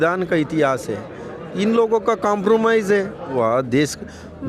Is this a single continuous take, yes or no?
no